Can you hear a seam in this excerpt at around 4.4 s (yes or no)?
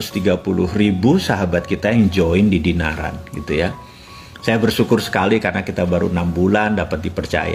no